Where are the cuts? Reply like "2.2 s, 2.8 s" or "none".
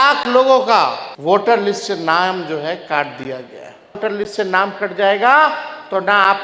1.1 s, 4.0 s